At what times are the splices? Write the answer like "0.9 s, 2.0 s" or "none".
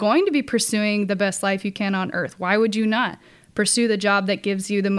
none